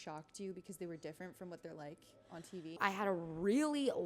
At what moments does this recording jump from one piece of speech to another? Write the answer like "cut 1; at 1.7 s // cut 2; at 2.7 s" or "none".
cut 1; at 2.8 s